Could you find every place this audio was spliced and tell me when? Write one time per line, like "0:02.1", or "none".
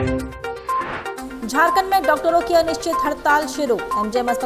none